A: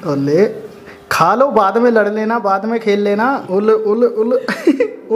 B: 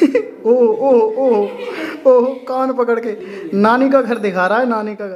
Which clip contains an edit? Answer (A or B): A